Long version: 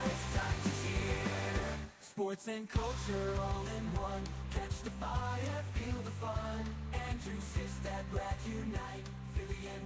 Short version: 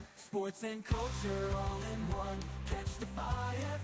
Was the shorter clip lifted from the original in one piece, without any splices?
yes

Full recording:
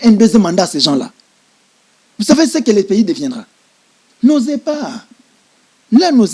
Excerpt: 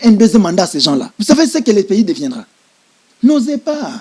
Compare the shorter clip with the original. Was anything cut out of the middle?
yes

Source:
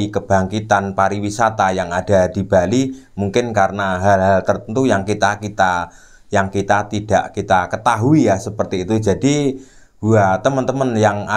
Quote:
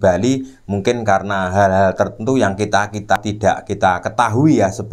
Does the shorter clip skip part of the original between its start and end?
yes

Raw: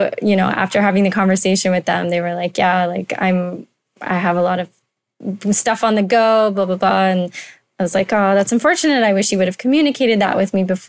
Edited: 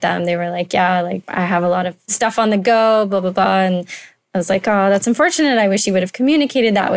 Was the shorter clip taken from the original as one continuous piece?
no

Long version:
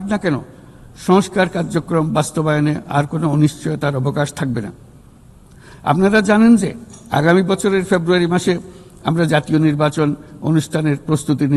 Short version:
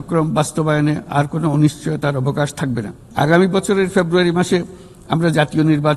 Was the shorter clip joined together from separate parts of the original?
yes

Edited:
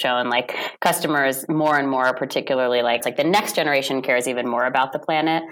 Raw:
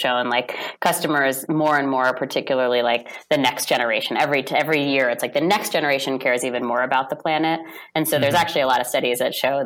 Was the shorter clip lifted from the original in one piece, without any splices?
no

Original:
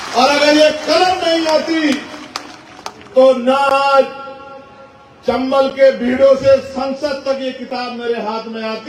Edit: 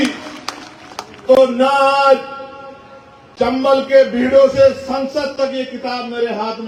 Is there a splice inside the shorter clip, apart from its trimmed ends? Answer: no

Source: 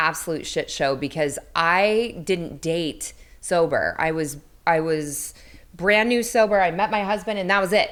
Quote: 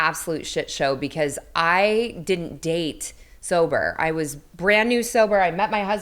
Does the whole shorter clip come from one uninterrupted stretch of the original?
no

